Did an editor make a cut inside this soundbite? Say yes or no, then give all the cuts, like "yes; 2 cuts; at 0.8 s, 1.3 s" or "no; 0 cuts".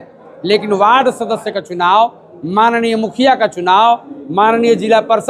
no; 0 cuts